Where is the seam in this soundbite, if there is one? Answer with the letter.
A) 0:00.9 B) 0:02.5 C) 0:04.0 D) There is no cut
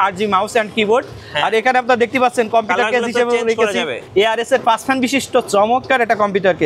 C